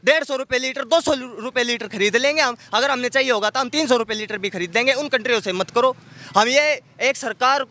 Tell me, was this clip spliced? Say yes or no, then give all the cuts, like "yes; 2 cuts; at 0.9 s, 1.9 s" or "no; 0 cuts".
no; 0 cuts